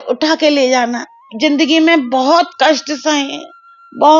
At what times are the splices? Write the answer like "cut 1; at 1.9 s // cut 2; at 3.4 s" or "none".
cut 1; at 1.3 s